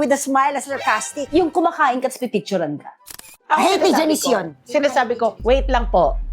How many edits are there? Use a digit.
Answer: 1